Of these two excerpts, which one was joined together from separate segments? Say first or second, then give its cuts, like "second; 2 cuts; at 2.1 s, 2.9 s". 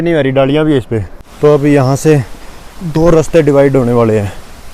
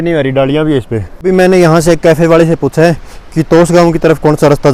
first; 1 cut; at 1.0 s